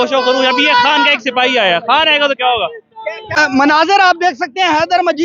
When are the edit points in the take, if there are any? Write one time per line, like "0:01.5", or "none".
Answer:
0:03.4